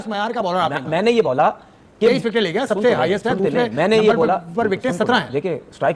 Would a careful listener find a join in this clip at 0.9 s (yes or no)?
no